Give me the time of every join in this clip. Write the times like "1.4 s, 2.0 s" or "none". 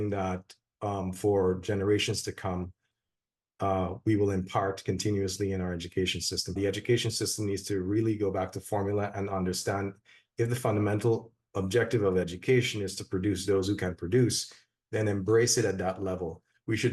6.5 s